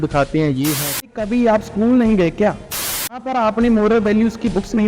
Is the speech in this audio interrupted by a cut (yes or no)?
yes